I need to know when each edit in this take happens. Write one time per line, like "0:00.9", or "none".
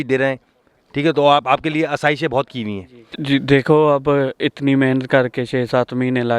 0:03.1

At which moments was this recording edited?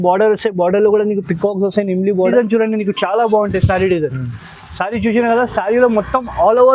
0:02.3

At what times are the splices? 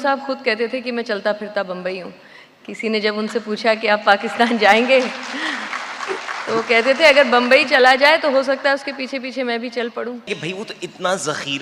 0:10.3

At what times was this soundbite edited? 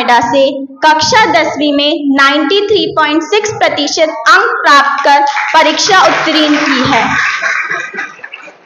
none

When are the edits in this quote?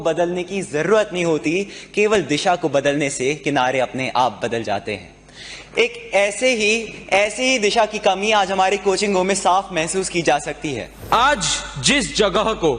0:10.9

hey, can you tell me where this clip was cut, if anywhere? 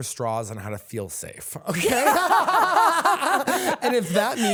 none

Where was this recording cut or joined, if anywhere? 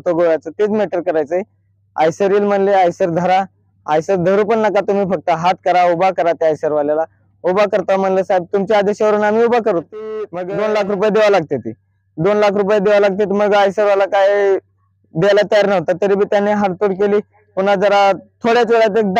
0:10.3

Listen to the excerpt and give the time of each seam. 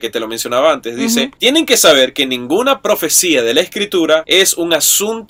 none

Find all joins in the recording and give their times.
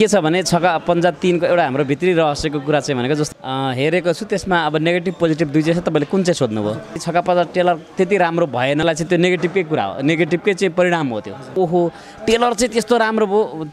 0:03.3
0:07.0
0:08.8
0:11.5

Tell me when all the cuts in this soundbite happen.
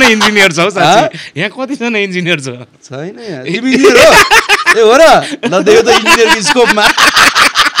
none

